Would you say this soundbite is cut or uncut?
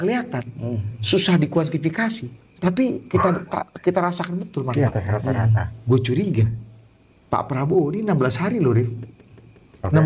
uncut